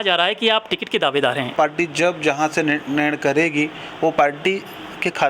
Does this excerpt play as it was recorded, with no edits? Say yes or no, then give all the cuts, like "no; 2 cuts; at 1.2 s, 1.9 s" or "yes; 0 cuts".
no; 1 cut; at 1.5 s